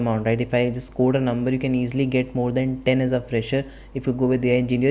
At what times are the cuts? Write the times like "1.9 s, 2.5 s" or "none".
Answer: none